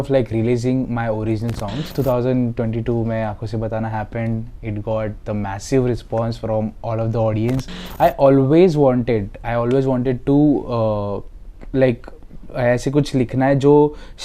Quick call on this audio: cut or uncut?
cut